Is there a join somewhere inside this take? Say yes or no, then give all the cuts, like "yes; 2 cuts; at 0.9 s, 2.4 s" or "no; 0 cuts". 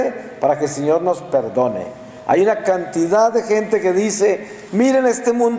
no; 0 cuts